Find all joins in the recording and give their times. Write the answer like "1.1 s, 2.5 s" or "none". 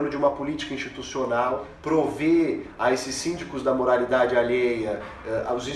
1.7 s